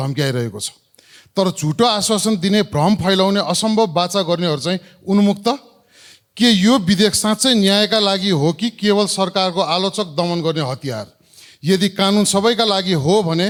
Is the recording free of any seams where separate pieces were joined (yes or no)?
yes